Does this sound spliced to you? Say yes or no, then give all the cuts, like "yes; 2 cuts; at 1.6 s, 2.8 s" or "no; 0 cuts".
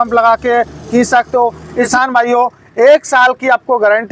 yes; 1 cut; at 1.9 s